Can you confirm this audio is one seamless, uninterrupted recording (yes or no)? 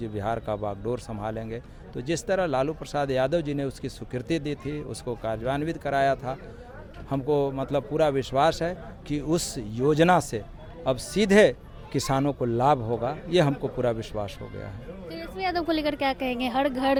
yes